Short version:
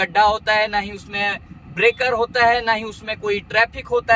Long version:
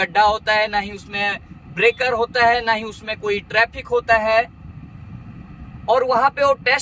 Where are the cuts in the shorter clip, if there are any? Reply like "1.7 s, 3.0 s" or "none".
none